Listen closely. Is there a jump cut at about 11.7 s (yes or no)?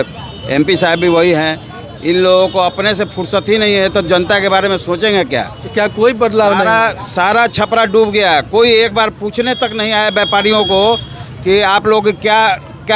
no